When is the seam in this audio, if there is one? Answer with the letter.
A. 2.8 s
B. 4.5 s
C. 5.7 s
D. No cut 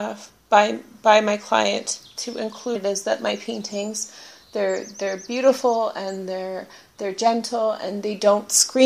D